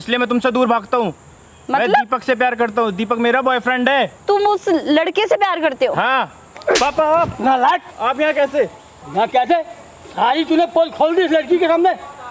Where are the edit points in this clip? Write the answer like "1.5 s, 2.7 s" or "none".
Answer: 4.2 s, 6.4 s, 7.9 s